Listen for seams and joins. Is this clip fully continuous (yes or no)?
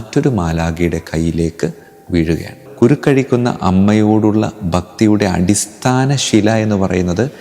no